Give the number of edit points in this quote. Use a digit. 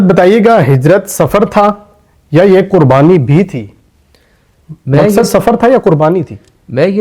0